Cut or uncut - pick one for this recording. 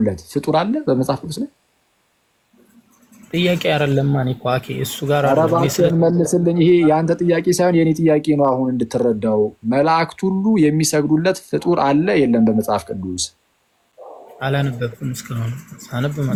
uncut